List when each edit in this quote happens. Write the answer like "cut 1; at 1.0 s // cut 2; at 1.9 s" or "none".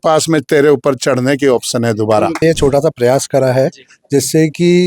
cut 1; at 2.4 s